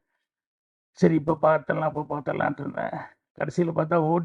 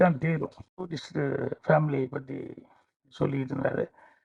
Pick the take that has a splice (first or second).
second